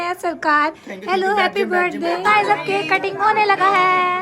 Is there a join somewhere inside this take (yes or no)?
yes